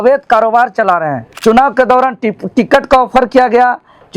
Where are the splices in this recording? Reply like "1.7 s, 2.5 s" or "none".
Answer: 1.2 s